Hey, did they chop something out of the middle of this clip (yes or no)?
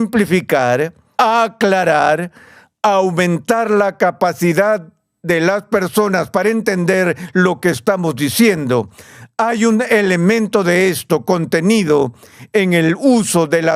no